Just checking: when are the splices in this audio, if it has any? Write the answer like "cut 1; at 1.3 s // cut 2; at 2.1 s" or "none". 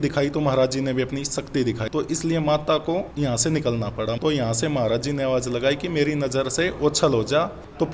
cut 1; at 1.8 s // cut 2; at 3.1 s // cut 3; at 4.2 s